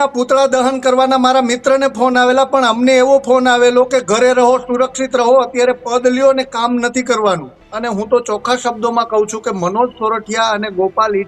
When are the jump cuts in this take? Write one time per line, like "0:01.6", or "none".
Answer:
0:07.6